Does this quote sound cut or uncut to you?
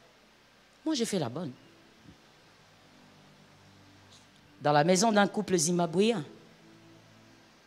uncut